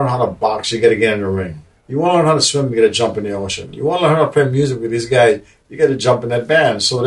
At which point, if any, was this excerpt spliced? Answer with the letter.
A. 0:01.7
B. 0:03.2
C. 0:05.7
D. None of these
A